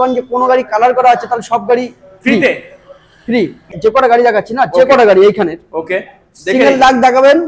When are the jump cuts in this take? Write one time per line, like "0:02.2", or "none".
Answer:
0:03.7